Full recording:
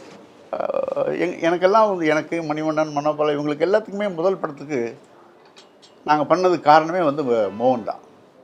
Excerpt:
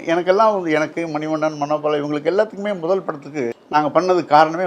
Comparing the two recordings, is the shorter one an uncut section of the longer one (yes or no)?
no